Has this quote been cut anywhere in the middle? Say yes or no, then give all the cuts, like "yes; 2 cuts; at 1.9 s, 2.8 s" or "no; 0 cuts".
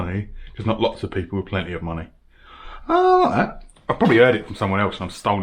no; 0 cuts